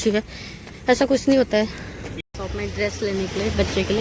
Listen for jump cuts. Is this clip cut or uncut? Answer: cut